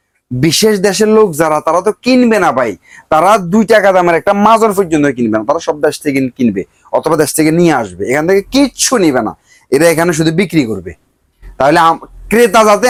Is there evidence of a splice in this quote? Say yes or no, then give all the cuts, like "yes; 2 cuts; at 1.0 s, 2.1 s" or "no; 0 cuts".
no; 0 cuts